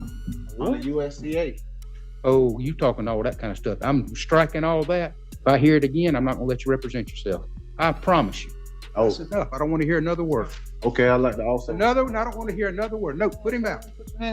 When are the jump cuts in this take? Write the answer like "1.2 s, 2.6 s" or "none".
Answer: 5.2 s, 7.6 s, 8.5 s